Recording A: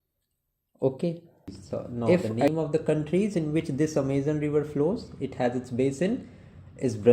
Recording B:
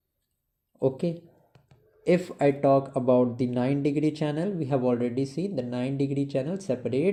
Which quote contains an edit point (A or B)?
A